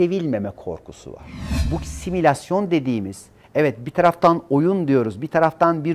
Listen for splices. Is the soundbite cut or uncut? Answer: cut